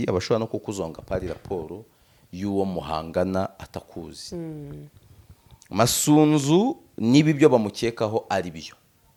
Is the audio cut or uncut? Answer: uncut